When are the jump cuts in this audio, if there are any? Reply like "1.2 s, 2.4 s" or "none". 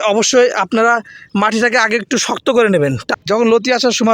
3.1 s